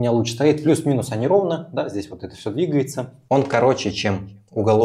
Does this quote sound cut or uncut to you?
cut